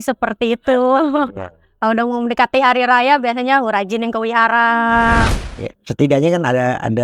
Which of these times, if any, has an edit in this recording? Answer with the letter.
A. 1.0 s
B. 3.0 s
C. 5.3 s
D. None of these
C